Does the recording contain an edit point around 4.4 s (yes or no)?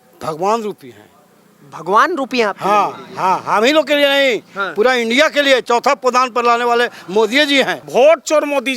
no